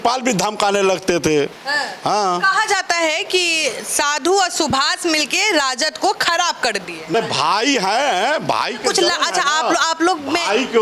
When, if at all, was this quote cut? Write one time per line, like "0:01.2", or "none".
0:01.6
0:07.1